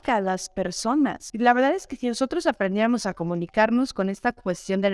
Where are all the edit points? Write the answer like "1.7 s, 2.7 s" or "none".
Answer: 1.2 s